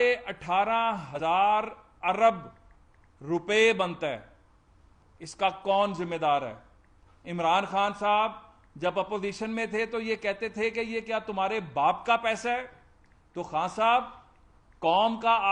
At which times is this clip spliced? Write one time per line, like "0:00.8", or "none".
0:01.1